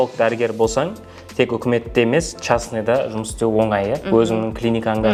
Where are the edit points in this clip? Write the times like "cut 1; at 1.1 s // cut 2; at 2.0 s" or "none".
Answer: none